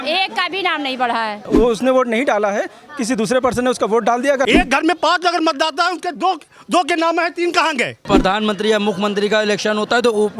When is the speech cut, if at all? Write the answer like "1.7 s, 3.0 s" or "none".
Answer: 1.4 s, 4.5 s, 8.0 s

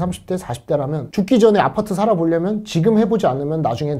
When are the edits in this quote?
none

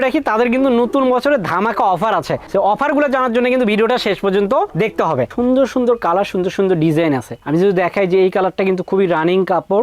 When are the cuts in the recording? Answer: 5.3 s

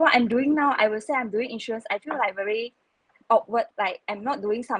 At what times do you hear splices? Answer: 3.7 s

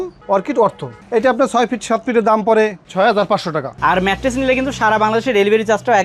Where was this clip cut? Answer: 3.7 s

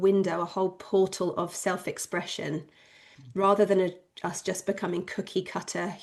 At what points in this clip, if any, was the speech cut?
none

